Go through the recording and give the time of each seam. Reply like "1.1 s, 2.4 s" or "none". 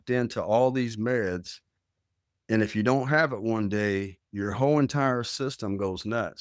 none